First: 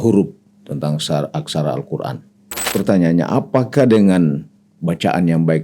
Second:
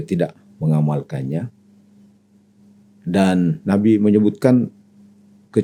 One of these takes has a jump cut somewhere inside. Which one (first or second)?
first